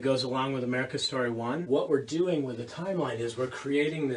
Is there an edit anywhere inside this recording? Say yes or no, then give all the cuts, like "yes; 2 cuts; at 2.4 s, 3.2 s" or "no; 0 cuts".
yes; 1 cut; at 1.6 s